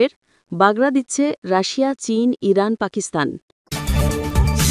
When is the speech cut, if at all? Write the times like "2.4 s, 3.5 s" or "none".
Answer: 3.5 s